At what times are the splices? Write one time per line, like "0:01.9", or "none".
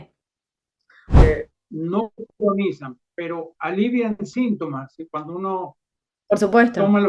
0:01.2